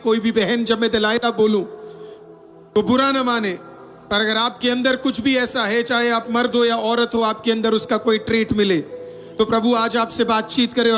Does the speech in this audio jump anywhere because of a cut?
no; 0 cuts

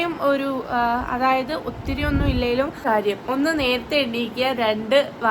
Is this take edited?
yes; 1 cut; at 2.8 s

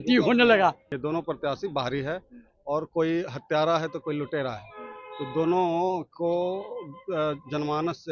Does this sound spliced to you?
yes; 1 cut; at 0.9 s

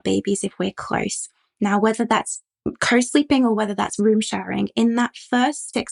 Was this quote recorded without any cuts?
yes; 0 cuts

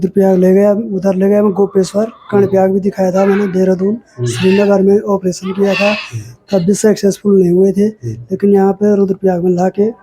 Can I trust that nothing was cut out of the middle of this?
yes; 0 cuts

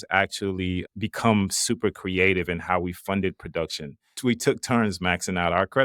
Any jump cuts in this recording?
yes; 1 cut; at 4.1 s

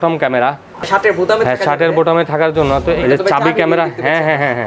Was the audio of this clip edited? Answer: yes; 2 cuts; at 0.9 s, 3.0 s

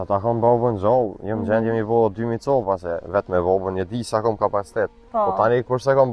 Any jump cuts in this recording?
no; 0 cuts

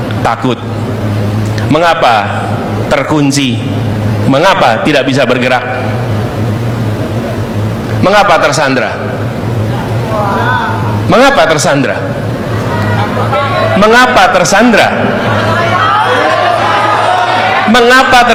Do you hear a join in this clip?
no; 0 cuts

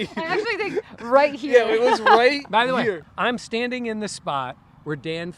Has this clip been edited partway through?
yes; 1 cut; at 3.1 s

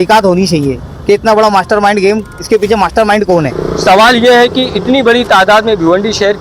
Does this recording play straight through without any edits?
no; 1 cut; at 3.6 s

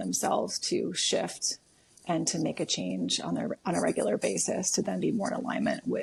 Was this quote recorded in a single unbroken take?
yes; 0 cuts

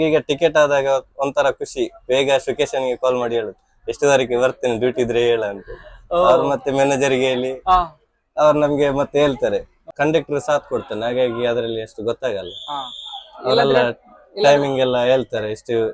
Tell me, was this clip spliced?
yes; 1 cut; at 9.8 s

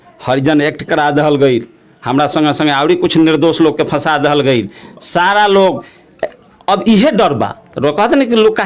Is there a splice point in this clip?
no; 0 cuts

